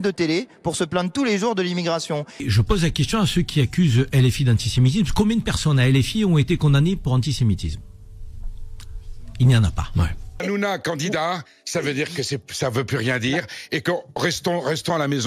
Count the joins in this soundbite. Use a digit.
2